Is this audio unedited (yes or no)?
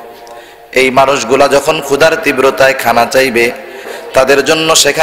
no